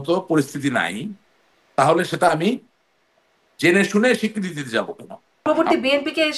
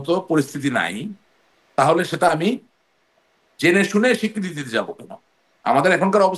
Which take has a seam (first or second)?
first